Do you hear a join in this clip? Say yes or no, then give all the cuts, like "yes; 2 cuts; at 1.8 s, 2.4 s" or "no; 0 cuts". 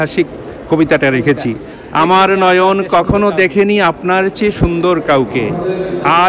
no; 0 cuts